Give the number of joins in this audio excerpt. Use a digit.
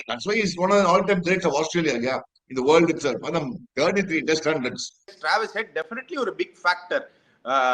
1